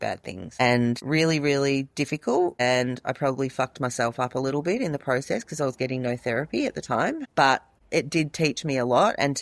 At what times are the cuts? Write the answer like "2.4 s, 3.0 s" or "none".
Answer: 2.6 s, 7.7 s